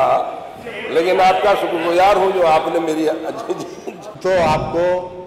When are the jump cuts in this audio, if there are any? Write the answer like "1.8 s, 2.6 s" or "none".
4.1 s